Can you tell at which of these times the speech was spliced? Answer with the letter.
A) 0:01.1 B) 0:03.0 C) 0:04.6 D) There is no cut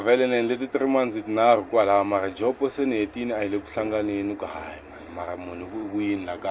D